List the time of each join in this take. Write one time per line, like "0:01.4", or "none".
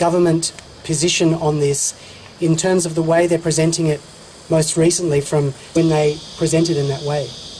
none

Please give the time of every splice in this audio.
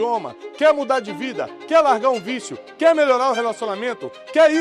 none

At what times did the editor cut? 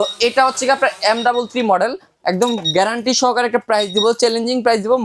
none

